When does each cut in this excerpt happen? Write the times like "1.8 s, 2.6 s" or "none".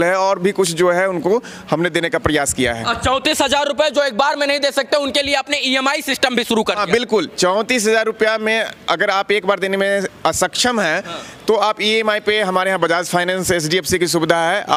none